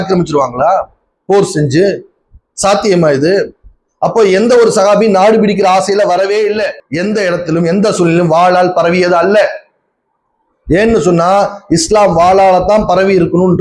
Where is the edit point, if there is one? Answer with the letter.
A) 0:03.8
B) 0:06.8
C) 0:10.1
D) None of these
B